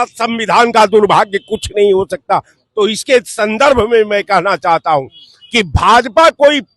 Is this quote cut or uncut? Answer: uncut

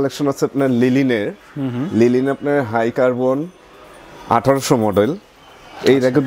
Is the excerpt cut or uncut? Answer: uncut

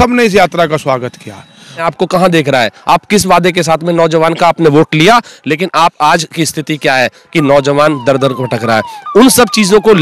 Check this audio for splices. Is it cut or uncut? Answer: cut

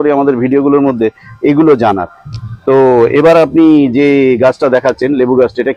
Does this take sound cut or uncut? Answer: uncut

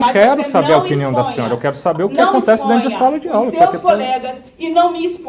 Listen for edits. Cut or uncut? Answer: uncut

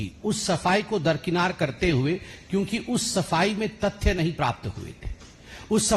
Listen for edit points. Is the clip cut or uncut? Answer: uncut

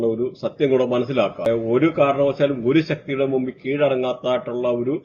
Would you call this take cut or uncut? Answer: cut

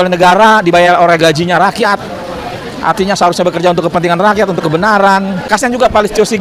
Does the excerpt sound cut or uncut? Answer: cut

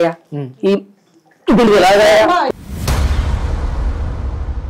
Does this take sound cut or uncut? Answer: uncut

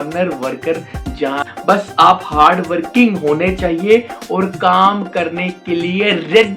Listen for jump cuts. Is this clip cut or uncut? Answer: cut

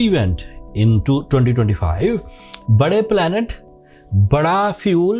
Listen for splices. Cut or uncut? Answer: uncut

